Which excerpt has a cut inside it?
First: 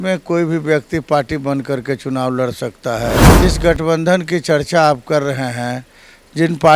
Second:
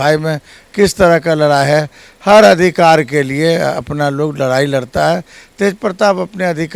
first; 1 cut; at 3.3 s

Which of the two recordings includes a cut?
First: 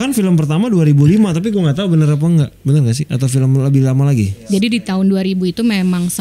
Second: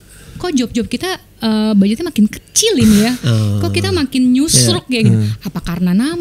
first; 1 cut; at 4.4 s

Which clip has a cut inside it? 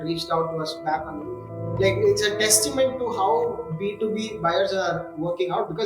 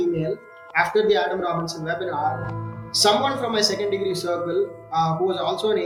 first; 1 cut; at 1.6 s

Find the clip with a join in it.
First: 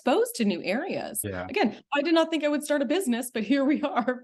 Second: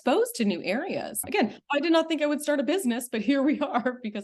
second; 1 cut; at 1.2 s

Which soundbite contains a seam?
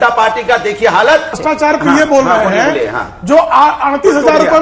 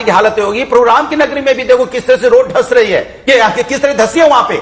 first; 1 cut; at 1.4 s

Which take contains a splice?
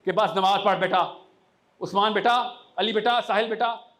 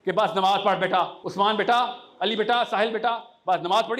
second; 1 cut; at 1.2 s

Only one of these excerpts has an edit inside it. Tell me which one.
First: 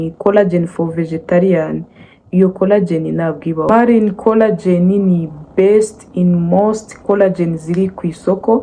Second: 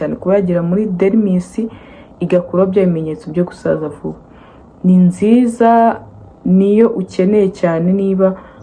first; 1 cut; at 3.6 s

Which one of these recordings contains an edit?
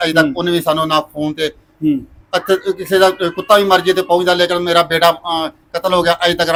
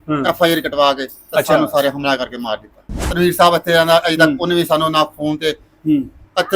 second; 1 cut; at 3.1 s

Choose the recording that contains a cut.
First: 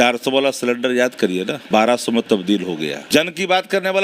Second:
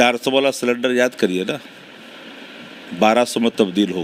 first; 2 cuts; at 1.6 s, 3.1 s

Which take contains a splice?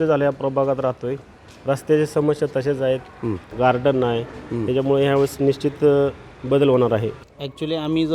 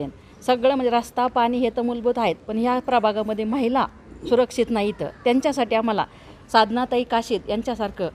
first; 2 cuts; at 3.5 s, 7.2 s

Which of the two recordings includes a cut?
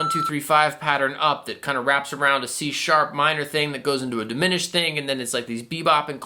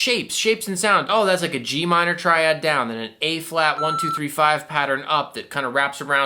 second; 1 cut; at 1.1 s

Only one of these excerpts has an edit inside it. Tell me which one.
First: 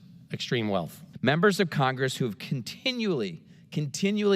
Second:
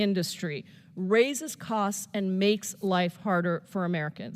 first; 1 cut; at 1.0 s

